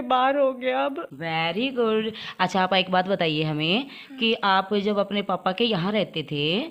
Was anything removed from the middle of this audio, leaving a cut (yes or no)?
yes